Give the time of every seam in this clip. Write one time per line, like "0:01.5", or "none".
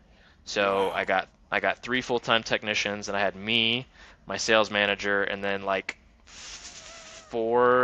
none